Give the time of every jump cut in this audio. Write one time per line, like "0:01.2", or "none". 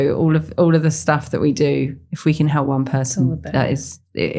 none